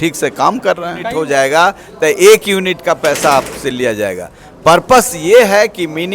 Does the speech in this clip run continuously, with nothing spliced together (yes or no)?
no